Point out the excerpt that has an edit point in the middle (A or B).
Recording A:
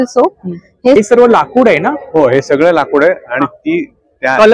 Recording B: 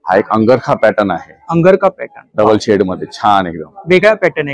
A